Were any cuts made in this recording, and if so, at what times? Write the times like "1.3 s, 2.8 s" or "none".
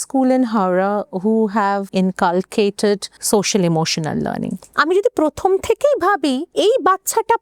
1.9 s, 3.1 s, 4.6 s, 6.5 s